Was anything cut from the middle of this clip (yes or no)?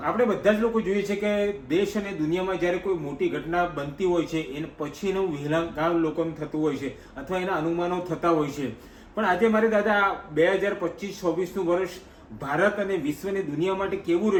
no